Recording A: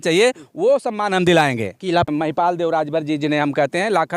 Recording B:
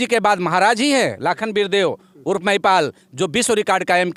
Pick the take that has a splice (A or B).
A